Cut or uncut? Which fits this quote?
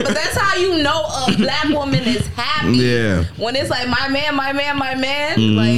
uncut